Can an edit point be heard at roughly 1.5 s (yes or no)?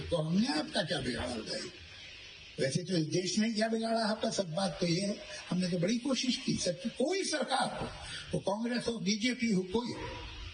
no